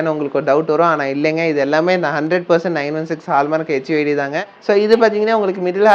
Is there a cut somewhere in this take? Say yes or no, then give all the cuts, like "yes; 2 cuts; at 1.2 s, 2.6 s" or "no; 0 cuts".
yes; 1 cut; at 4.4 s